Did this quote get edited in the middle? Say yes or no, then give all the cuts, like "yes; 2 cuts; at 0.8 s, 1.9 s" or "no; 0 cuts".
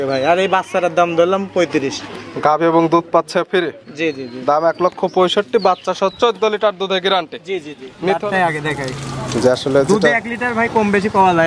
yes; 1 cut; at 8.2 s